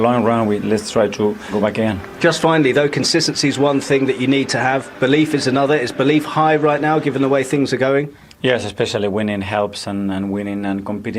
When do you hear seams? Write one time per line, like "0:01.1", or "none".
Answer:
0:01.4